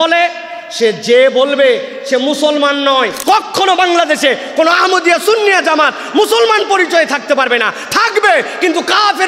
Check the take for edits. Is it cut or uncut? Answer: cut